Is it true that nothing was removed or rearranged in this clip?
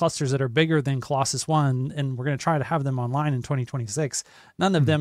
yes; 0 cuts

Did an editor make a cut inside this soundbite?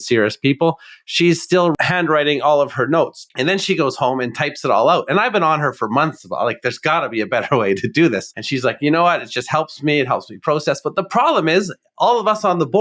yes; 3 cuts; at 1.8 s, 3.2 s, 8.3 s

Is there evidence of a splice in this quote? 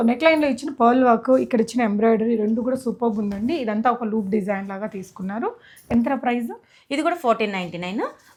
no; 0 cuts

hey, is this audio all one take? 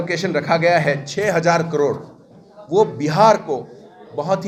yes; 0 cuts

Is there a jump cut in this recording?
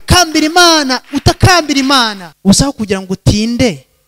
yes; 1 cut; at 2.2 s

